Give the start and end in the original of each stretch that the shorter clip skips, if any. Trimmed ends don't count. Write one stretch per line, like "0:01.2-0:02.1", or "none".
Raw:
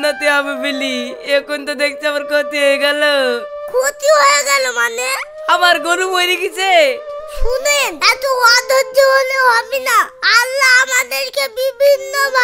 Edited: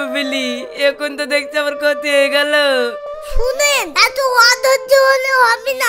0:03.5-0:07.1